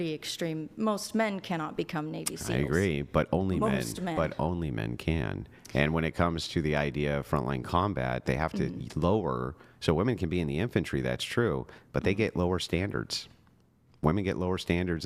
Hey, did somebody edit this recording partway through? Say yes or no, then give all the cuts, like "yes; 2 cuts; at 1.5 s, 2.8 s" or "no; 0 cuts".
no; 0 cuts